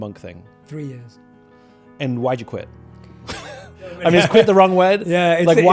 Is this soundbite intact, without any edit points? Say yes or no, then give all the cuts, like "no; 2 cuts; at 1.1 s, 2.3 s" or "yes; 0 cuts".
no; 1 cut; at 4.0 s